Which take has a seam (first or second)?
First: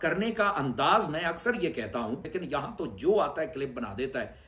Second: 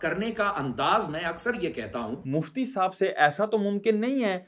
first